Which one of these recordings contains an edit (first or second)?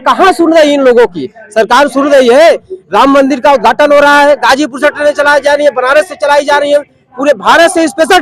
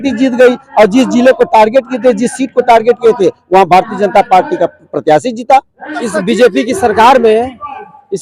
second